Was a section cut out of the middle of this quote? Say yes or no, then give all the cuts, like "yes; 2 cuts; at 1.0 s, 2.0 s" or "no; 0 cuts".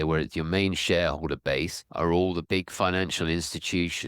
yes; 2 cuts; at 1.8 s, 2.4 s